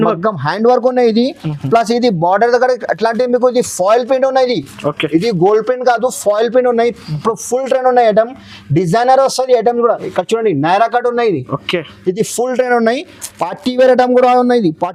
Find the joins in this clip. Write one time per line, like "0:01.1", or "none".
none